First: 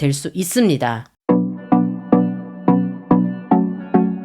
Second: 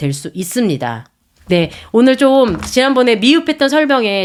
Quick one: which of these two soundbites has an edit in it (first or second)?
first